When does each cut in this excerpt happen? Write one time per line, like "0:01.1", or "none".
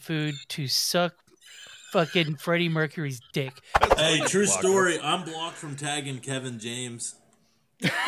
0:03.8